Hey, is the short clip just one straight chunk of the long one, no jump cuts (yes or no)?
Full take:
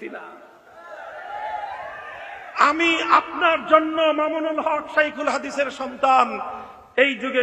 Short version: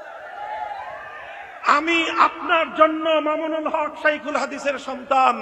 yes